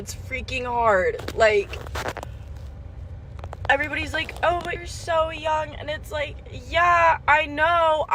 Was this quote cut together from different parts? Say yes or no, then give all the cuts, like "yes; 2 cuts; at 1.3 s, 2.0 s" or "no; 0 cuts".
no; 0 cuts